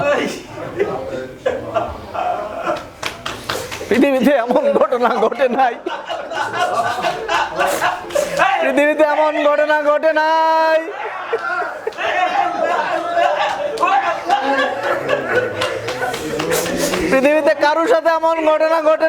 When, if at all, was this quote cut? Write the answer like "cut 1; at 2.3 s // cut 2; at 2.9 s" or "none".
none